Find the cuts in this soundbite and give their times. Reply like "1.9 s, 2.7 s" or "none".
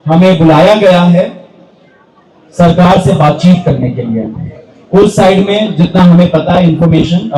none